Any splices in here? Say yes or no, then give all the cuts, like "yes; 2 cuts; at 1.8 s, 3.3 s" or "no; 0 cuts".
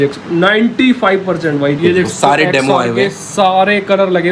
yes; 1 cut; at 1.8 s